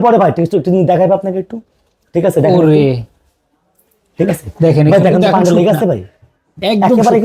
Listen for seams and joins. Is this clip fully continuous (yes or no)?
yes